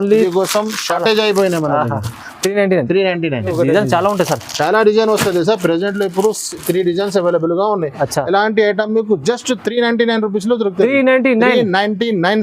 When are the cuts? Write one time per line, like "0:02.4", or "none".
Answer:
0:03.5